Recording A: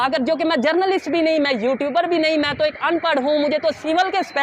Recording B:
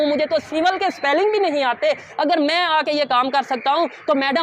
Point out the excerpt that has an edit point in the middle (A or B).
B